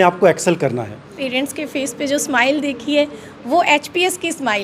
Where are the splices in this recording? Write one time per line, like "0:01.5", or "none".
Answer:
0:01.2